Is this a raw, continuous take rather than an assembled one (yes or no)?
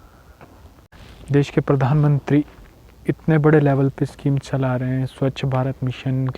no